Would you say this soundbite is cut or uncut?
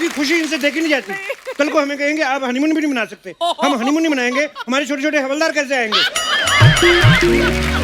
uncut